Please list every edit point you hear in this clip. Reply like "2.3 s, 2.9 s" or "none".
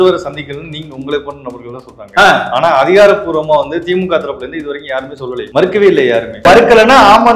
5.5 s, 6.5 s

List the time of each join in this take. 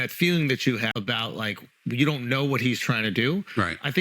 0.9 s

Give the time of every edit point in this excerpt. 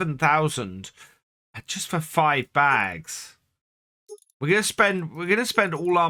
none

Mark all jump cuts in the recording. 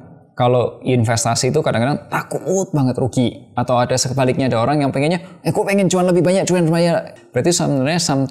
7.1 s

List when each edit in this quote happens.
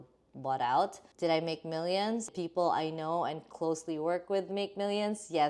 1.0 s, 2.3 s

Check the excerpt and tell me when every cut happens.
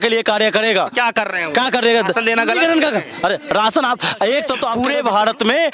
4.7 s

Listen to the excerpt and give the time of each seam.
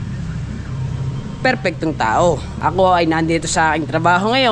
2.5 s

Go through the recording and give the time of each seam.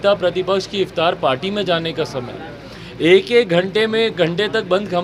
none

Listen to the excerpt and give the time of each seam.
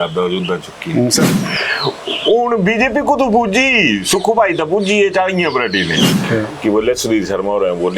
1.3 s, 6.2 s

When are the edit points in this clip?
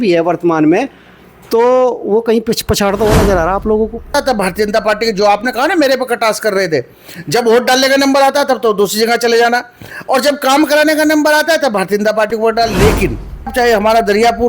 4.1 s, 13.5 s

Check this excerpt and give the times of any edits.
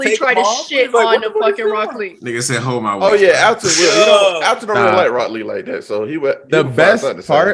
none

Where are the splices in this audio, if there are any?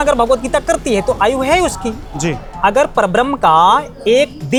none

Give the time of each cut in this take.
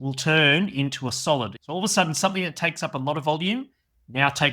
1.6 s

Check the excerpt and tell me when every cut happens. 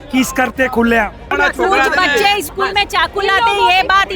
1.2 s

